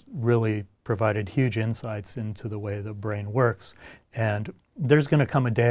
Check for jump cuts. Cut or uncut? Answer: uncut